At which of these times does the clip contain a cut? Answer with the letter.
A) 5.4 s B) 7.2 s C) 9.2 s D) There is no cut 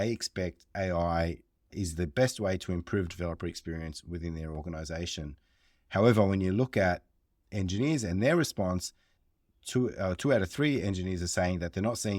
C